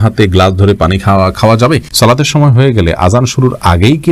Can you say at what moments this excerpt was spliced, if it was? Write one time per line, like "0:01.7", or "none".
0:01.9